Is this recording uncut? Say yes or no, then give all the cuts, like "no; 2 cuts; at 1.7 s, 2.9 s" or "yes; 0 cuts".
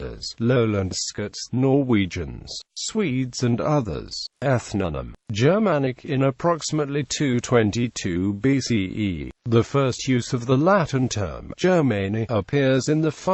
no; 1 cut; at 11.6 s